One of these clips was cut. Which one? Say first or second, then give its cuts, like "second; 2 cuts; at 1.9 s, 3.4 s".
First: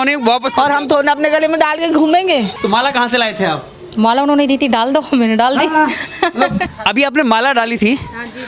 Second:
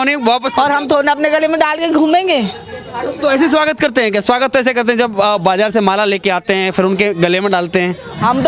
first; 2 cuts; at 2.5 s, 6.7 s